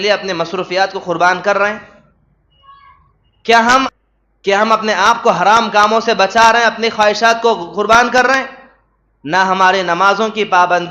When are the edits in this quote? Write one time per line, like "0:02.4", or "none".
0:03.9